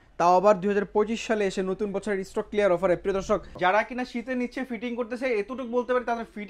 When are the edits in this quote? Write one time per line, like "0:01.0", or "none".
0:03.5